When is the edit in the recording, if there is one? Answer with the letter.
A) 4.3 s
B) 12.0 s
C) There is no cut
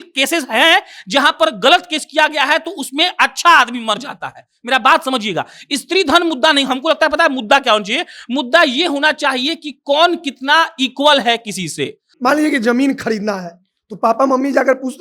B